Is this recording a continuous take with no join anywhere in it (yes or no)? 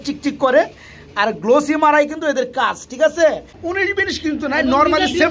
no